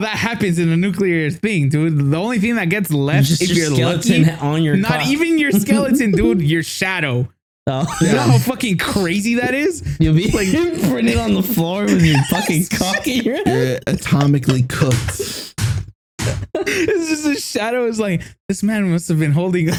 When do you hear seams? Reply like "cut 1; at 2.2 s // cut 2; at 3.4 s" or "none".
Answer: none